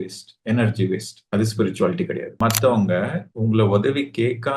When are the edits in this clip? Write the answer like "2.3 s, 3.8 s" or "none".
2.3 s

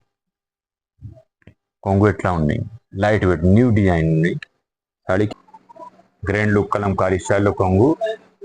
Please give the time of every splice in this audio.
5.3 s

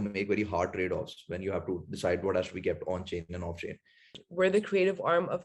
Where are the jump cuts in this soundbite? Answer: 4.2 s

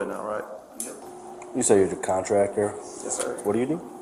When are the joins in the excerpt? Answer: 1.0 s

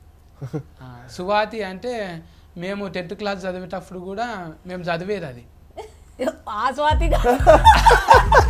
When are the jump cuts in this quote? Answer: none

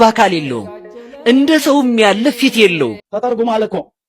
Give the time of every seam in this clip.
3.0 s

